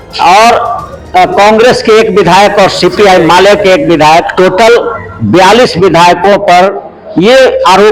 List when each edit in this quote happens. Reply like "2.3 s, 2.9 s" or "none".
none